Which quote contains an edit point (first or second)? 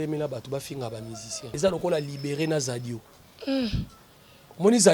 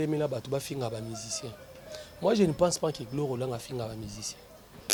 first